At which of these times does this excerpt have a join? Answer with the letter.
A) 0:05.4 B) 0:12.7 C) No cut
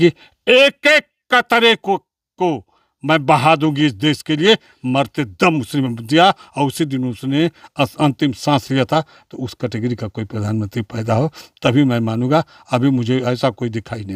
C